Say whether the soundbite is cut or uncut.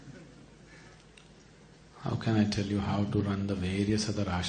uncut